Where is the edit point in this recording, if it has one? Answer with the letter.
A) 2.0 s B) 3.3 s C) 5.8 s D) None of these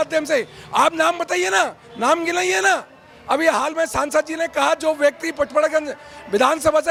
D